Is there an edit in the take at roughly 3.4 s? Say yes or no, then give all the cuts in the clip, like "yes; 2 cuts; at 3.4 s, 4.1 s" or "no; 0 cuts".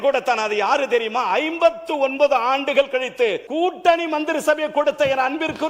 yes; 1 cut; at 3.4 s